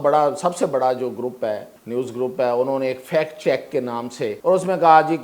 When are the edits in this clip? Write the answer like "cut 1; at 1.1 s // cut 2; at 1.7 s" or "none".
cut 1; at 1.7 s // cut 2; at 4.4 s